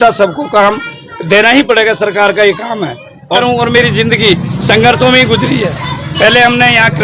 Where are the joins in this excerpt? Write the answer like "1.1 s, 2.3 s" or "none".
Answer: 3.4 s

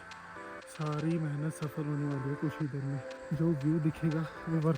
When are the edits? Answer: 3.1 s

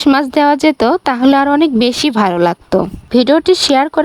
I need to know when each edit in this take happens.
3.1 s

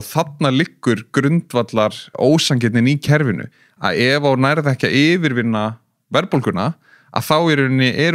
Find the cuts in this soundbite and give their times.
2.1 s

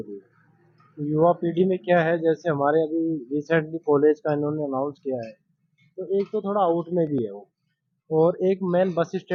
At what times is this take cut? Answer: none

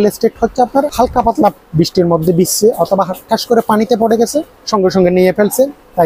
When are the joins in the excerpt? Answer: 0.9 s

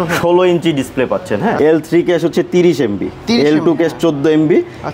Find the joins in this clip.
1.6 s

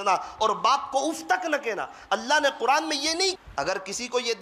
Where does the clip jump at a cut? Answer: 3.4 s

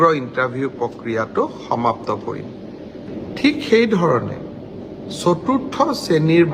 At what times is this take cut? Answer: 3.1 s

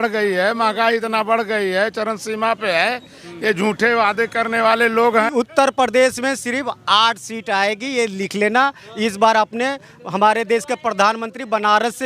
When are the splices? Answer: 5.3 s

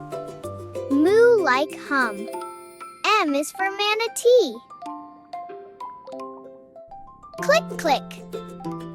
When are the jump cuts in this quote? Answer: 0.9 s, 5.1 s, 7.5 s

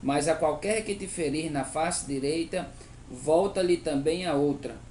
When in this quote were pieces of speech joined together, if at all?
none

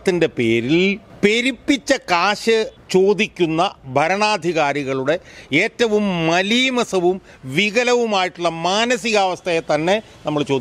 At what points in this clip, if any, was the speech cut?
1.1 s, 2.8 s

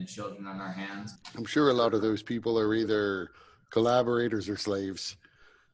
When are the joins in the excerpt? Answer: 1.1 s

